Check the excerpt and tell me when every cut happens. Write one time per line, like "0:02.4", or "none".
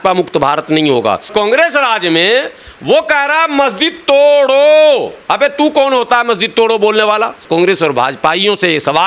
0:01.3
0:07.4